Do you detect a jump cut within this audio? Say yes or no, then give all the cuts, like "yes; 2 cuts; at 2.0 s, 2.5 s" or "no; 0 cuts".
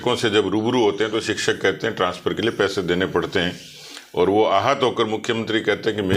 no; 0 cuts